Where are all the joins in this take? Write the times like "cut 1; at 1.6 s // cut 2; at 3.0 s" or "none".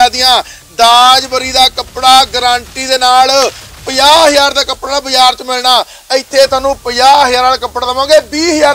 none